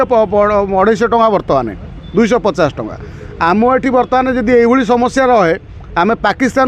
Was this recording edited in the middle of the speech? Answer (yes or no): no